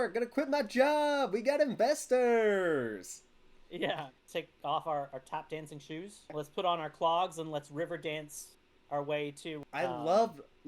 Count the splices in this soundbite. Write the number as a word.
three